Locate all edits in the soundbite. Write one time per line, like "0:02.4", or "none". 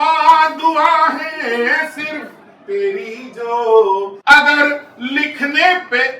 0:04.2